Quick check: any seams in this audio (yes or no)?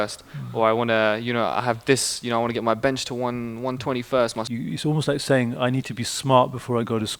yes